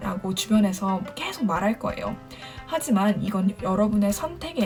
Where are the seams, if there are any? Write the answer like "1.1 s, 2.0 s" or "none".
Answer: none